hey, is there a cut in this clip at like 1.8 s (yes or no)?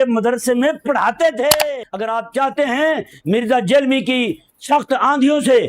yes